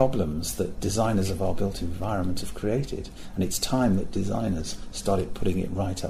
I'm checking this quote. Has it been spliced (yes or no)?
no